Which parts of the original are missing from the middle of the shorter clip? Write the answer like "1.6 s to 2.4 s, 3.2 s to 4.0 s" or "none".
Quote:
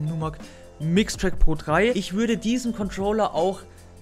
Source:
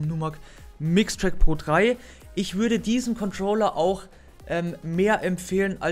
2.0 s to 2.4 s